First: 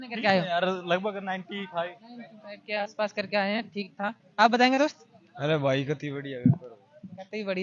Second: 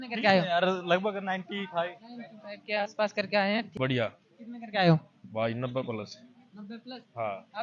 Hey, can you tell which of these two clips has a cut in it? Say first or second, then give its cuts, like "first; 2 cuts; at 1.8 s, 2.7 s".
second; 1 cut; at 3.7 s